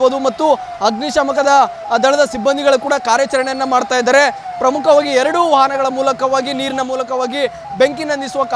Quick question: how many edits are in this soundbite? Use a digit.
1